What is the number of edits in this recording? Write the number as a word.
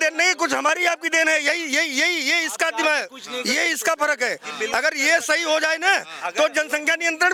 zero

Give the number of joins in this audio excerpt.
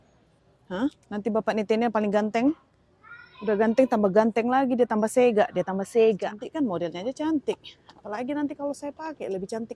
one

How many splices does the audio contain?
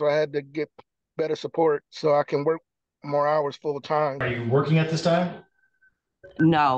two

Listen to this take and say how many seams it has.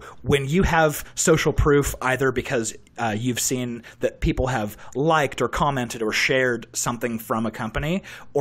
zero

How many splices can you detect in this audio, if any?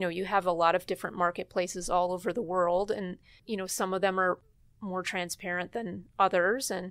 two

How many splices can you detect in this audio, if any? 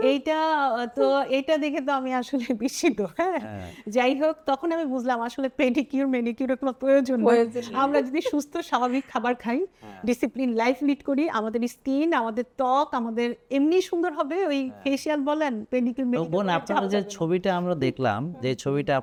zero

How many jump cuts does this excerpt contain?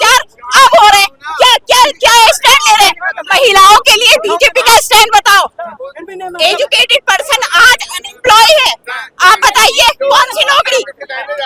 zero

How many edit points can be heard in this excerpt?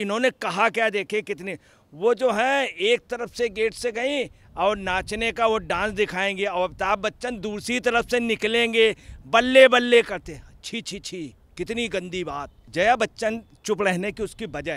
one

